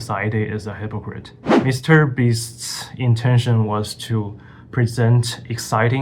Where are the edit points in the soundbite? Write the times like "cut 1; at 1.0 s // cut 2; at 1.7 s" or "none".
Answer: cut 1; at 1.5 s

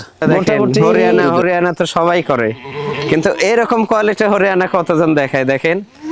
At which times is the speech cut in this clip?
cut 1; at 1.3 s

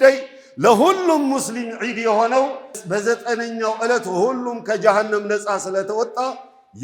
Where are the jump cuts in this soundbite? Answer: cut 1; at 2.8 s

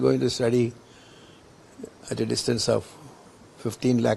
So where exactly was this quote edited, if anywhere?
none

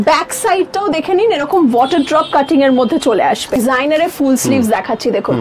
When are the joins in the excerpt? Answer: cut 1; at 3.6 s

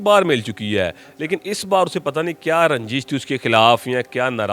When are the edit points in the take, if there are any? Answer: none

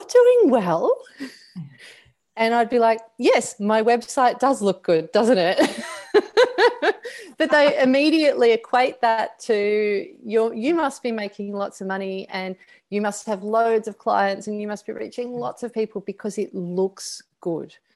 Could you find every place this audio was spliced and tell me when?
none

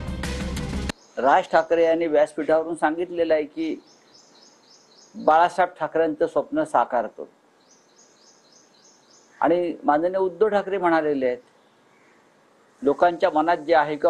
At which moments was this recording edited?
cut 1; at 0.9 s

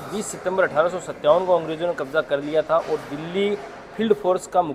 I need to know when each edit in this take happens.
none

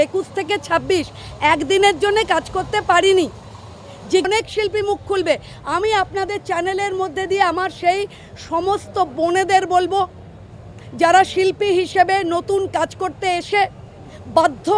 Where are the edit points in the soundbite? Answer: cut 1; at 4.3 s

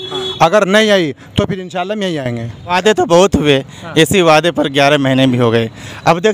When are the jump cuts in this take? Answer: cut 1; at 2.8 s

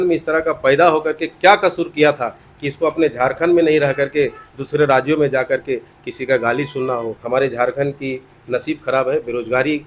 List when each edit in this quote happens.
cut 1; at 7.2 s

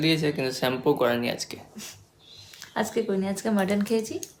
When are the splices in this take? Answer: none

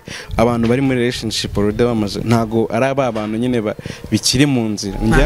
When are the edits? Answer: none

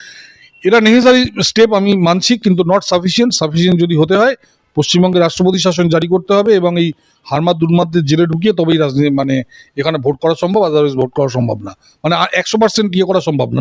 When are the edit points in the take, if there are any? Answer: none

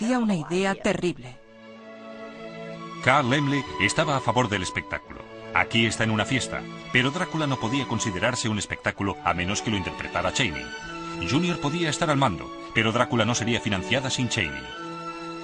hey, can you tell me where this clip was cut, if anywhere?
cut 1; at 1.0 s

